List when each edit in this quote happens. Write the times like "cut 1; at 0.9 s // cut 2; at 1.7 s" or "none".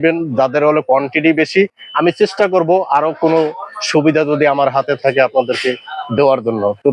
none